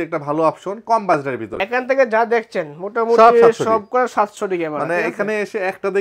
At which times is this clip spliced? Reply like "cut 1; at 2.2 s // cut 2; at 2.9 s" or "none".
cut 1; at 1.5 s